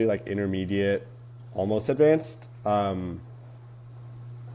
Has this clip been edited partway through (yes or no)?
no